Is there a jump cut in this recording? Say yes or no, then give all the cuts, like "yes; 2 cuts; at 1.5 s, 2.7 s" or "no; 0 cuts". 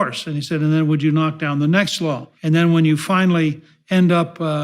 yes; 1 cut; at 2.3 s